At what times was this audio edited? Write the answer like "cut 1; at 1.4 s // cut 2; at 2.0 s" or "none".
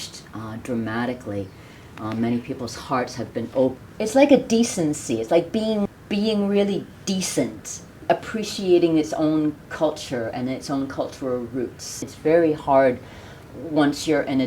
cut 1; at 3.7 s // cut 2; at 5.9 s // cut 3; at 12.1 s